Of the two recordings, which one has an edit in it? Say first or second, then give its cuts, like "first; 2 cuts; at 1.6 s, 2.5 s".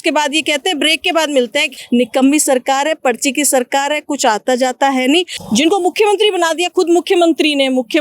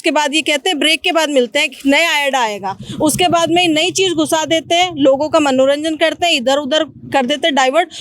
first; 2 cuts; at 1.7 s, 5.4 s